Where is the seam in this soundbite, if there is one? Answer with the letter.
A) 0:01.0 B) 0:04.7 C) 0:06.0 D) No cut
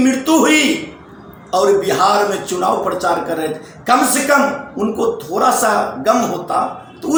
D